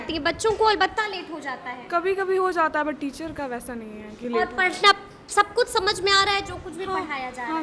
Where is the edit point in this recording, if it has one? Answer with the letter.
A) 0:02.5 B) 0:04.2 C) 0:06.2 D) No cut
D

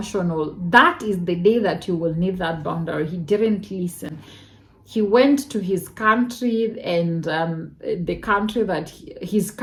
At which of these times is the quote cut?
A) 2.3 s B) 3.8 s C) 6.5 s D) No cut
D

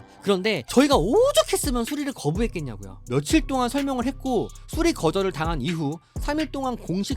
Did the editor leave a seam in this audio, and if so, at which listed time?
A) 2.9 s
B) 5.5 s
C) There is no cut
A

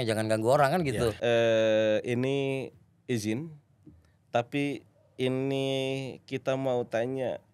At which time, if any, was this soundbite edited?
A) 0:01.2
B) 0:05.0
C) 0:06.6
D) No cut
A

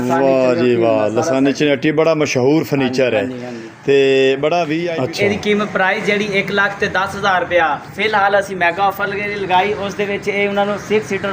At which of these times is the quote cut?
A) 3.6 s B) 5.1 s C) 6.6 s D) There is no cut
B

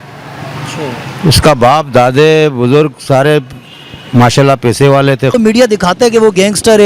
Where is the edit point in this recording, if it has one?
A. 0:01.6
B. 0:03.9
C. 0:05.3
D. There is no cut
C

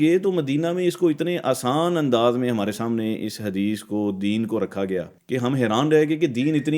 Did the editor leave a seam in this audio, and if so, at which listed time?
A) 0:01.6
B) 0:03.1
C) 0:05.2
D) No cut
C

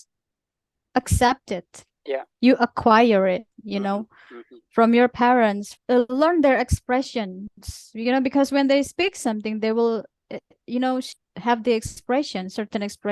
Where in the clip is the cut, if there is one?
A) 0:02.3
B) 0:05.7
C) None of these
B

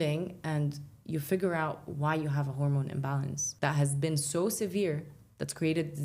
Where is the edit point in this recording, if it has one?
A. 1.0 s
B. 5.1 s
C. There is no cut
C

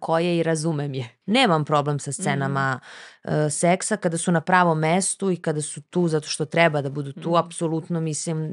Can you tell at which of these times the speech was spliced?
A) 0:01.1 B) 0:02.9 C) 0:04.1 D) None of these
A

